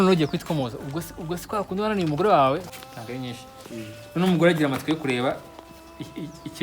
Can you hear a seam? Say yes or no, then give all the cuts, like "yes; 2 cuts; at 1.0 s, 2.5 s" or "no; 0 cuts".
yes; 1 cut; at 2.7 s